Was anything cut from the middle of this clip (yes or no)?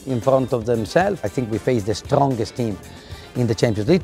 yes